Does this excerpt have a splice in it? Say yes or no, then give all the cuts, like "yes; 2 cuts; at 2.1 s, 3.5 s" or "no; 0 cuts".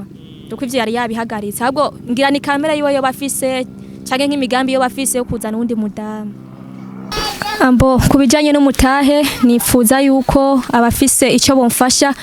yes; 1 cut; at 7.1 s